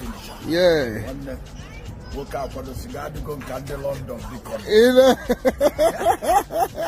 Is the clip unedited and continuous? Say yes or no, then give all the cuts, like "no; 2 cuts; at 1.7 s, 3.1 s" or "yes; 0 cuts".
yes; 0 cuts